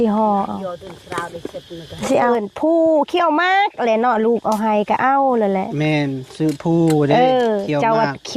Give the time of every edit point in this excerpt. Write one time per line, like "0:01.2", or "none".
0:02.3